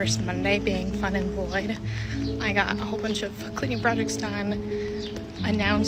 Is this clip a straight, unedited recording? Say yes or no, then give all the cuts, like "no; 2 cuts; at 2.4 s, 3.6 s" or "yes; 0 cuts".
yes; 0 cuts